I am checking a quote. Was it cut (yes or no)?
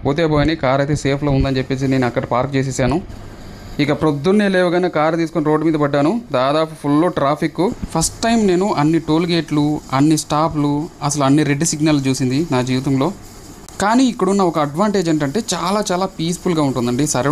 no